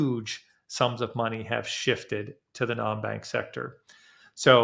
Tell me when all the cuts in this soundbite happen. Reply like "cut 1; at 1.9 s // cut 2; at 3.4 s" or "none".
none